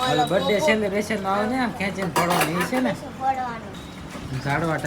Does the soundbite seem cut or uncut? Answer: cut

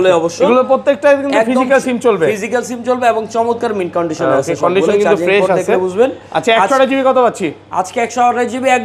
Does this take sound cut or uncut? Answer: uncut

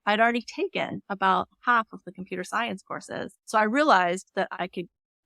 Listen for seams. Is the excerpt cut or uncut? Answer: cut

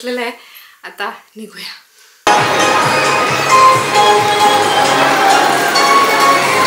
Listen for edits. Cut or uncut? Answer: uncut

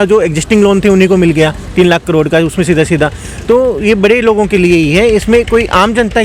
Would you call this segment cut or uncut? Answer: uncut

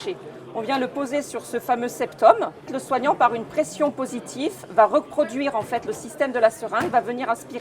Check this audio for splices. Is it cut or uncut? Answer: cut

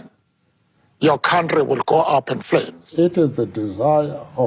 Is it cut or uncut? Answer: cut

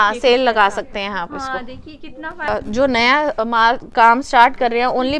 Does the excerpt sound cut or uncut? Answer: cut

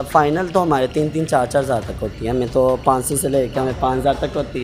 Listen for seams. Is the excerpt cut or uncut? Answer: uncut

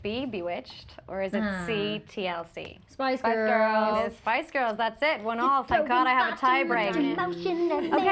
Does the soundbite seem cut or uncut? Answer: uncut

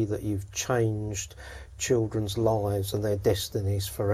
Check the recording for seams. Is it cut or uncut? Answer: uncut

